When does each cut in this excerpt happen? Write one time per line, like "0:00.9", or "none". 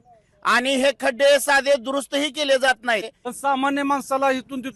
0:03.2